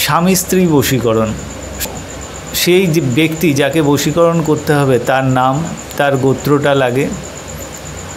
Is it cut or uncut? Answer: cut